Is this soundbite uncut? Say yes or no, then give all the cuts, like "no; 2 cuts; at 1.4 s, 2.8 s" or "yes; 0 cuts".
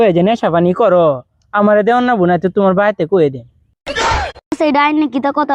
yes; 0 cuts